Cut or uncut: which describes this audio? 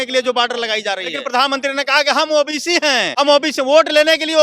cut